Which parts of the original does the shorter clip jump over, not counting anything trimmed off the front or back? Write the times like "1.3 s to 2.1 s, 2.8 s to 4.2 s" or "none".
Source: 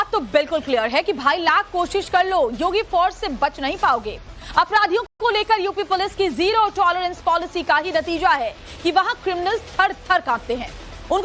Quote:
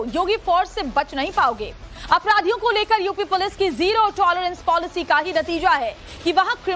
5.0 s to 5.2 s